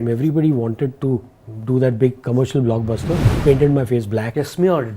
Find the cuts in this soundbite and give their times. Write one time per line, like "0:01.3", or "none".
0:03.3